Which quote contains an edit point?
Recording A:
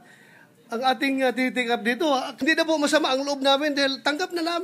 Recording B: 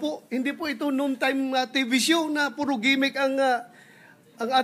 A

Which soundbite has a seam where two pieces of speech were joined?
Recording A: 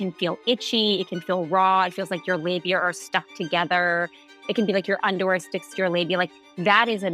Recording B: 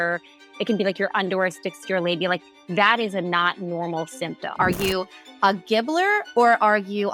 B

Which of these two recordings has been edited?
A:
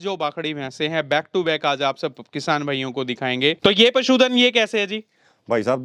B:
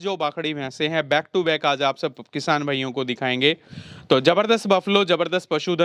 A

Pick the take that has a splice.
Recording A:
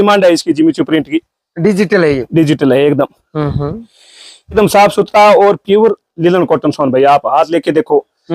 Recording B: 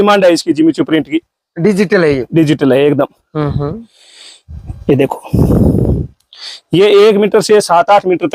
A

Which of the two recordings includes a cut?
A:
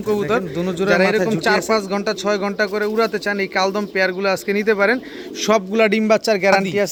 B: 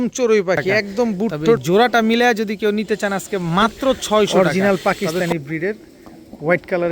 B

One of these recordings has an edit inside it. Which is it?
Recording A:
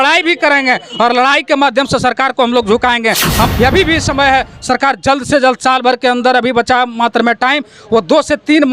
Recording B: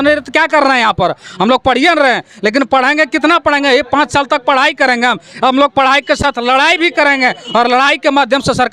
A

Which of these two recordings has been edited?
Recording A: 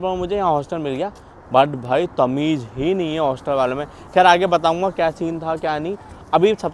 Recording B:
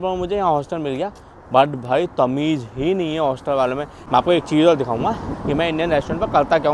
B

